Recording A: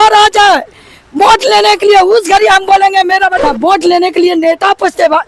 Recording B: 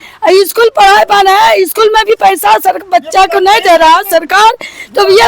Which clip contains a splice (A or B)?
A